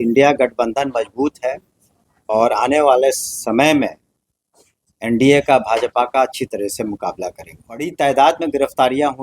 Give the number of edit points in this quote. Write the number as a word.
one